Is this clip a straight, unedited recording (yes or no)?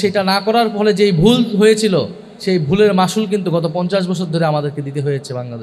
yes